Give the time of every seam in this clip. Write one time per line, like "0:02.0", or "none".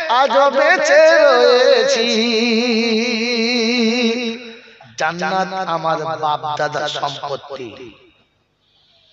0:04.8